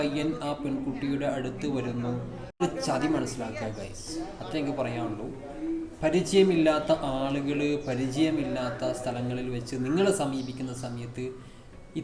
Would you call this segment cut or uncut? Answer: cut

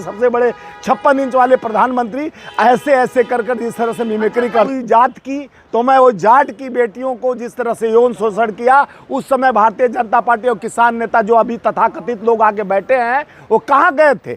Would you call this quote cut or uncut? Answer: cut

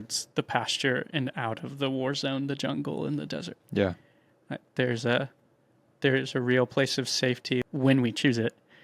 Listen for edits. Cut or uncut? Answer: cut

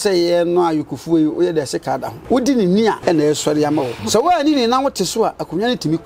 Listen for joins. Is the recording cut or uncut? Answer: cut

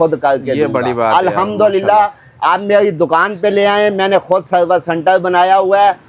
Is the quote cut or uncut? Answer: uncut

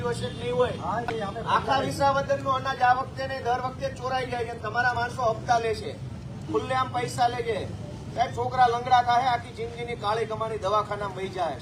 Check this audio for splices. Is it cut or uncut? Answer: uncut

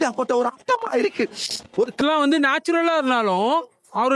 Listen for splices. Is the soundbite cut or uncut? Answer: cut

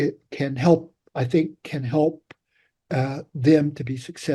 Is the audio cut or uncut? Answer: uncut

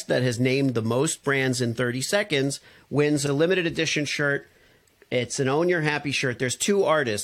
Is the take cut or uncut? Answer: cut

